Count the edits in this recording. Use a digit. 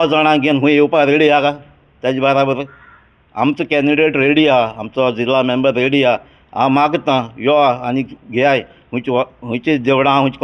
0